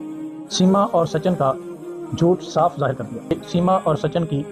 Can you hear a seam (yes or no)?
yes